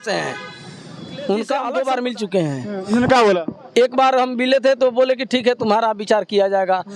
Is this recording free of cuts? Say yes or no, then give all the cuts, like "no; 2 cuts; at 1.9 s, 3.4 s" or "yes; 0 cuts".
no; 1 cut; at 1.7 s